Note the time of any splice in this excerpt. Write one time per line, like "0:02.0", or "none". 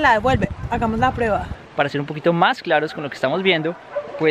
0:01.6